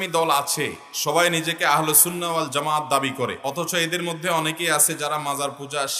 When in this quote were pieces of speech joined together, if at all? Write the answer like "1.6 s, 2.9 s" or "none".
3.4 s